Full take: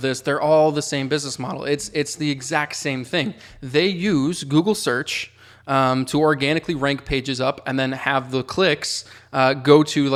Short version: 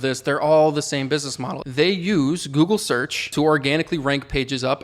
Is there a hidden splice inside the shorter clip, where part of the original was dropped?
yes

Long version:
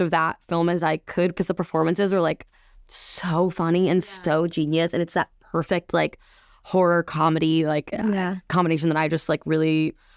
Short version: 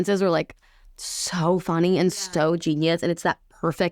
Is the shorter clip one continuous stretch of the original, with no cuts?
yes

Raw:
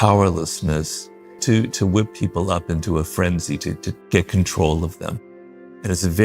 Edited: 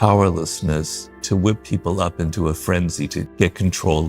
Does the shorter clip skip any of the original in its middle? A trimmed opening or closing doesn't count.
yes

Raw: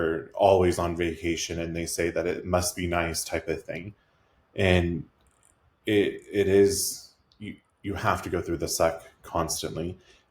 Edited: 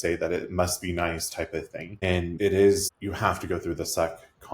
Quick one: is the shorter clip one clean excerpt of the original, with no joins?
no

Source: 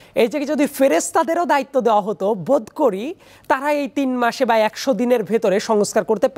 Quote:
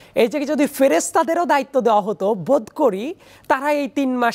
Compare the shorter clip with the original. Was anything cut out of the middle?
no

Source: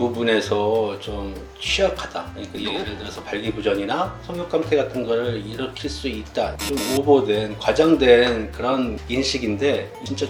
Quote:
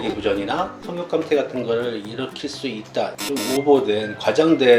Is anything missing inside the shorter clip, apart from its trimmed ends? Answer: no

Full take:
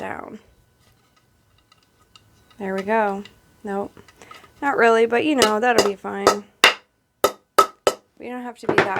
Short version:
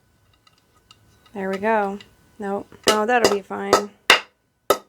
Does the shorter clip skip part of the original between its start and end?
yes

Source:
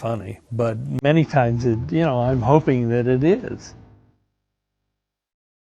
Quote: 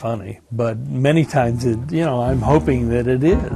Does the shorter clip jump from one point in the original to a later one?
no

